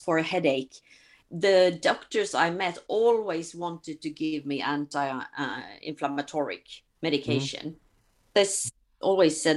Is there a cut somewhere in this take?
yes; 2 cuts; at 1.2 s, 8.3 s

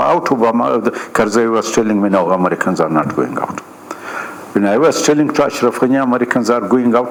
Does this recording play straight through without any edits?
yes; 0 cuts

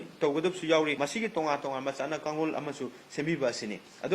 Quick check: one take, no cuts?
no; 1 cut; at 1.0 s

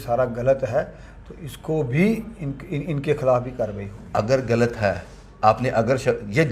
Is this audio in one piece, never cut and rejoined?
yes; 0 cuts

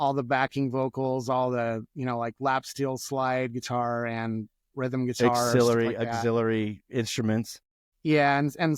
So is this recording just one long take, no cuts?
yes; 0 cuts

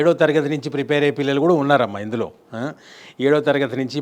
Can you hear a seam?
no; 0 cuts

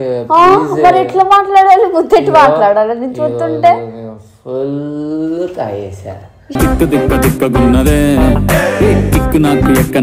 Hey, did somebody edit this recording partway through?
no; 0 cuts

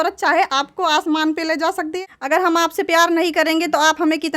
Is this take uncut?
no; 1 cut; at 2.0 s

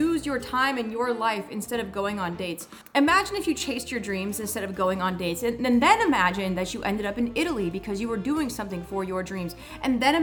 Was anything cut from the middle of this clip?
no; 0 cuts

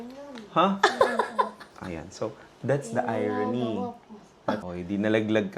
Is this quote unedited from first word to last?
no; 1 cut; at 4.6 s

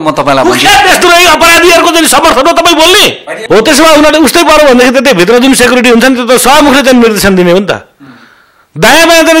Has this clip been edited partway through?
yes; 1 cut; at 3.3 s

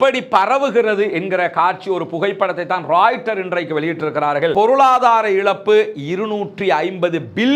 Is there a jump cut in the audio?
yes; 1 cut; at 4.5 s

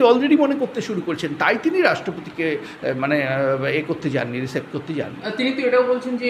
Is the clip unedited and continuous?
yes; 0 cuts

